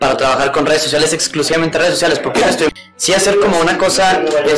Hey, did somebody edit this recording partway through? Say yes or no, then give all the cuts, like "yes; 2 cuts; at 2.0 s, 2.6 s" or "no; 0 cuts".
yes; 1 cut; at 2.7 s